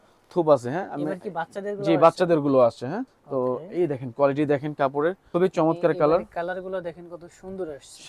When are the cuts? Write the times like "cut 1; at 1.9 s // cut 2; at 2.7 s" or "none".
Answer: cut 1; at 3.2 s // cut 2; at 5.2 s